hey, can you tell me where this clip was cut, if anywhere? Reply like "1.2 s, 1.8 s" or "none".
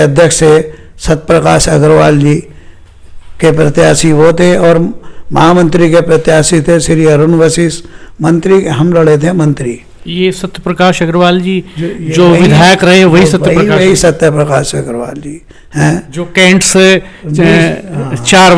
none